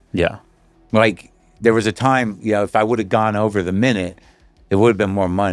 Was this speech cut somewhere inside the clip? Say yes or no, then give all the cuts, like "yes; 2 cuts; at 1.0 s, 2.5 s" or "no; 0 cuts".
no; 0 cuts